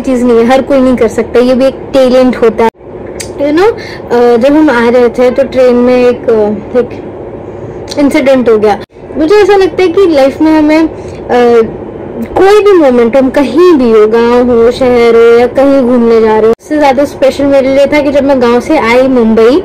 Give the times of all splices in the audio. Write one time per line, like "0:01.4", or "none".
0:02.7
0:09.1
0:16.7

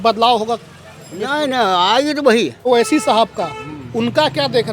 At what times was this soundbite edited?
0:02.7

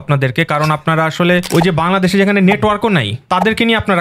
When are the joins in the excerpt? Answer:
0:01.5
0:03.1

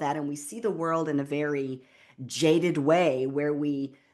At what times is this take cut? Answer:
none

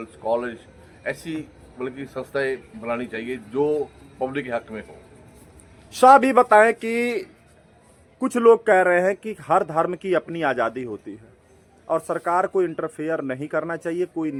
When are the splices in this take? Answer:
none

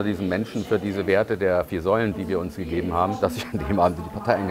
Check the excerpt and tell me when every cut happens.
0:02.1
0:03.2

